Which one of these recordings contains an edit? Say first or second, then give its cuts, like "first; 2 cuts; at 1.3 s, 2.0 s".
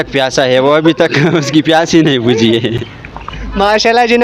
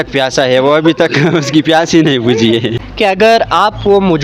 second; 1 cut; at 2.8 s